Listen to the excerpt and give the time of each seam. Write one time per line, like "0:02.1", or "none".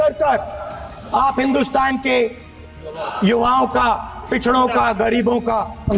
none